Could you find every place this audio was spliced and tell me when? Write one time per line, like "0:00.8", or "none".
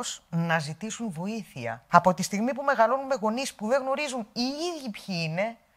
0:01.8